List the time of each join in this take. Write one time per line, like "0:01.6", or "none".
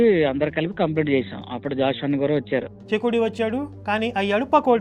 none